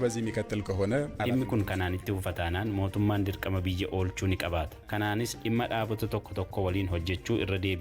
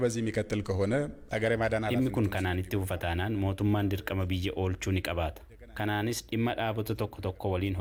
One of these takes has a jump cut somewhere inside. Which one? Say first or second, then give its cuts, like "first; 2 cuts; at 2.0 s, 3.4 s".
first; 2 cuts; at 1.2 s, 4.8 s